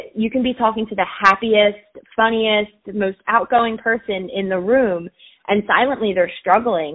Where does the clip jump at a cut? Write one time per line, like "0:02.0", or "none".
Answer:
none

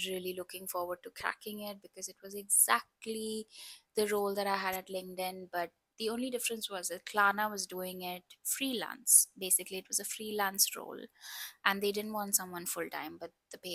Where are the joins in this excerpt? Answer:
none

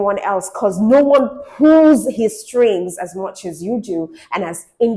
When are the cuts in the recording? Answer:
none

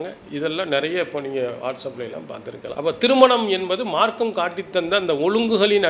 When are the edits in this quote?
0:02.7

